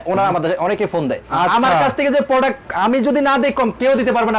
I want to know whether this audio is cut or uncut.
cut